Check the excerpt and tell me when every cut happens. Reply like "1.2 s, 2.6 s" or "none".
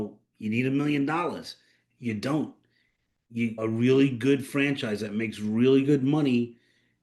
3.6 s